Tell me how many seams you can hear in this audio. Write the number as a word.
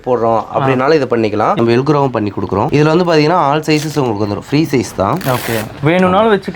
three